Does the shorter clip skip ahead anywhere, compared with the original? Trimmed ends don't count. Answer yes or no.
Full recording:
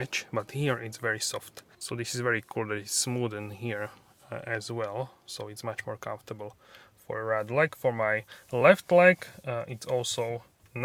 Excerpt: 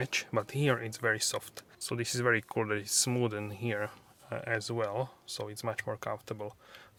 no